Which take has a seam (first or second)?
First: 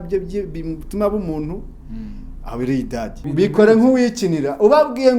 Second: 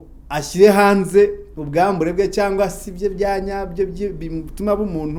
first